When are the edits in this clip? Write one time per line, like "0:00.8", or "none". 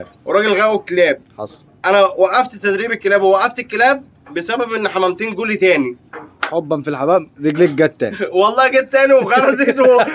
none